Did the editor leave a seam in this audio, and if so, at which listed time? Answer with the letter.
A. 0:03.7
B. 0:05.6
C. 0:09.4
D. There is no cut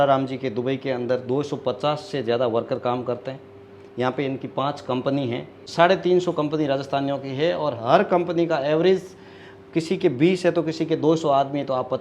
B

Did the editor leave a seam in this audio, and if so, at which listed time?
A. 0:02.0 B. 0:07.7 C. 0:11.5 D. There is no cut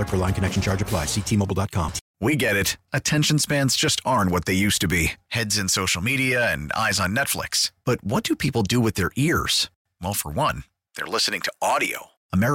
A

